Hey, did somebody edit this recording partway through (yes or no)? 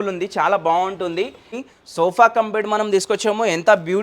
yes